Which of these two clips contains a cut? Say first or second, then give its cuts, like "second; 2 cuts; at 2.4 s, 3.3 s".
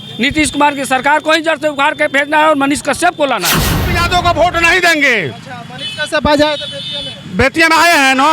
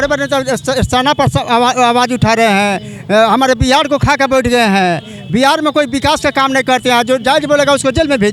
first; 1 cut; at 3.9 s